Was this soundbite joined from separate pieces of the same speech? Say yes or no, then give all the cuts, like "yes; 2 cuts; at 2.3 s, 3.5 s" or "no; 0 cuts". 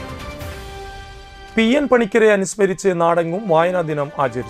yes; 1 cut; at 1.2 s